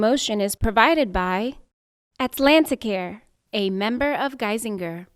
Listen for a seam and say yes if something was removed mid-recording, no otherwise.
no